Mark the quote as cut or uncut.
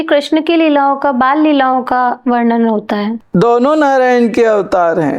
cut